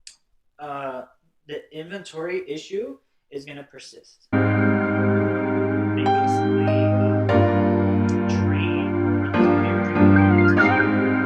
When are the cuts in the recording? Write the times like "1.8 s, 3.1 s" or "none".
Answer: 4.3 s

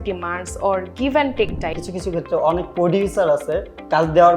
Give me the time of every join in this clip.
1.8 s

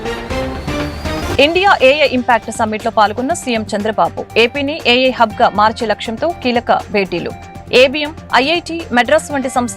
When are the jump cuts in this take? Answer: 1.1 s

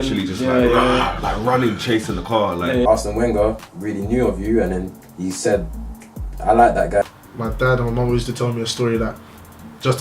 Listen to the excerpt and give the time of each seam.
2.8 s, 7.0 s

